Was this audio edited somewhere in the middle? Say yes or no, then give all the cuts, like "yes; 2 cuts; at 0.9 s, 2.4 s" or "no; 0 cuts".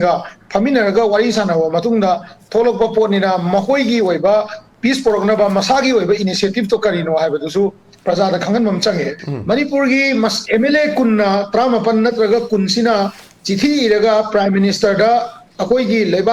yes; 1 cut; at 9.2 s